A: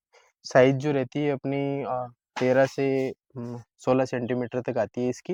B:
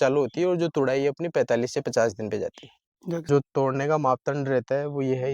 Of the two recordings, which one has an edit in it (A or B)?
B